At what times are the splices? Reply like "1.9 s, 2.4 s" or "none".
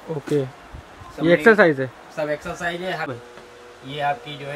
3.1 s